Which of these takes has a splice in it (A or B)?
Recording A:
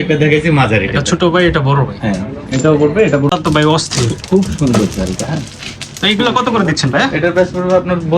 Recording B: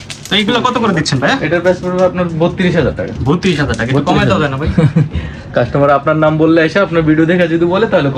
A